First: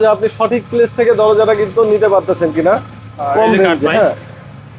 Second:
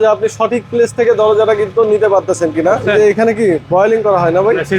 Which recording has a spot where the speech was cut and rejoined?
second; 1 cut; at 2.8 s

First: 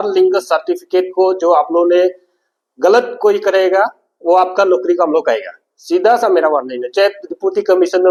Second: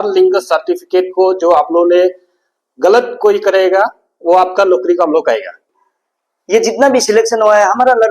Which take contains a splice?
second; 1 cut; at 5.7 s

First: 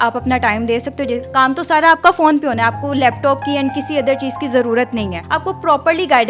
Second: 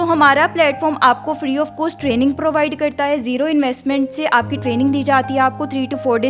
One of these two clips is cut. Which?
first; 2 cuts; at 1.2 s, 5.2 s

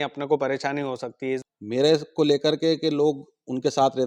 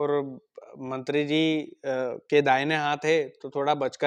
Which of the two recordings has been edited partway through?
first; 1 cut; at 1.4 s

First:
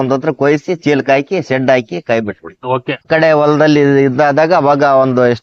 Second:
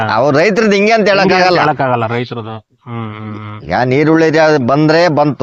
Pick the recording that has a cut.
first; 1 cut; at 3.0 s

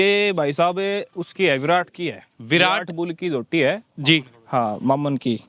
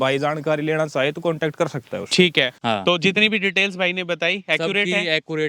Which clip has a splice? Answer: second; 1 cut; at 2.6 s

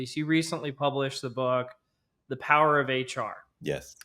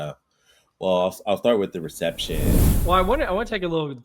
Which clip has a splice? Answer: second; 1 cut; at 2.7 s

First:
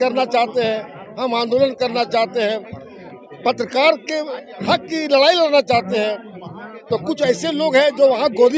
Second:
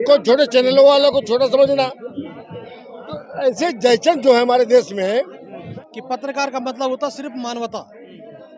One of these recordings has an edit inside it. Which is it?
second; 1 cut; at 5.7 s

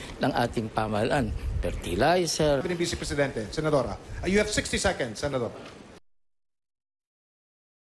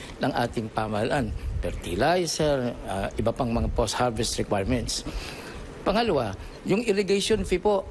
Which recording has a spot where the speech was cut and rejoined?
second; 1 cut; at 2.6 s

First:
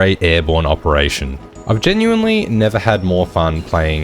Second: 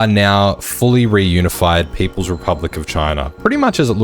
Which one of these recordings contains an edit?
first; 1 cut; at 1.5 s

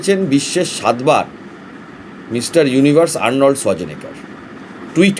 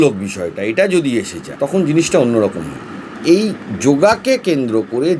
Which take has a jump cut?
second; 2 cuts; at 1.4 s, 3.2 s

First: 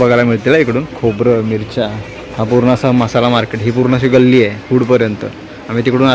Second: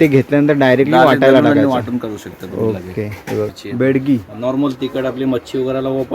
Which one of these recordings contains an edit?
second; 1 cut; at 3.6 s

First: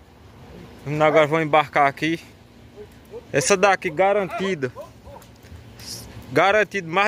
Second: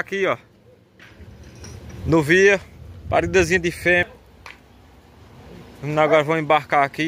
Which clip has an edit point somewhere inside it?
second; 1 cut; at 4.0 s

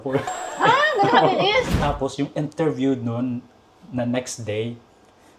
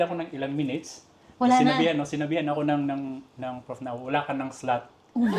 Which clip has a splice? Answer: first; 1 cut; at 1.7 s

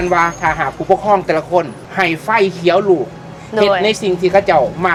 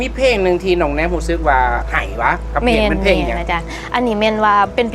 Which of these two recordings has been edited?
second; 2 cuts; at 1.9 s, 3.8 s

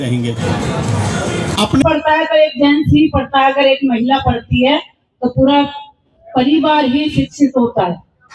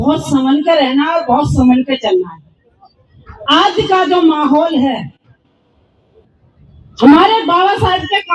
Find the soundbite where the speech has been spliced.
first; 1 cut; at 1.8 s

